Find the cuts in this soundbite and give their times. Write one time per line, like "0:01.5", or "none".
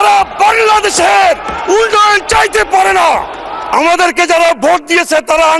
0:03.6